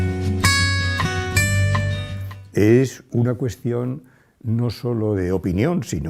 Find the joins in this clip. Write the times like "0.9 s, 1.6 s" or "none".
none